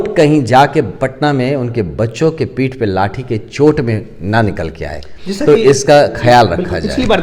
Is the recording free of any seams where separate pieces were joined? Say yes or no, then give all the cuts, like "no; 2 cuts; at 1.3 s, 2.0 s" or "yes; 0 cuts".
yes; 0 cuts